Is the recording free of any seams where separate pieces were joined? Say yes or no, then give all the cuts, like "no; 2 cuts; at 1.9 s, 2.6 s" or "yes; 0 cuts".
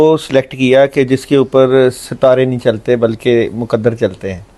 yes; 0 cuts